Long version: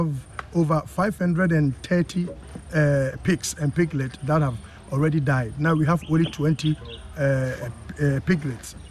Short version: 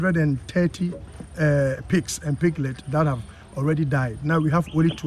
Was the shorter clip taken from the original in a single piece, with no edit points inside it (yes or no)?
yes